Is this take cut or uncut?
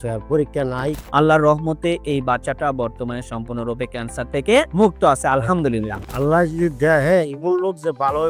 cut